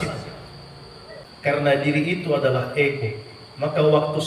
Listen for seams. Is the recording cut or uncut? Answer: cut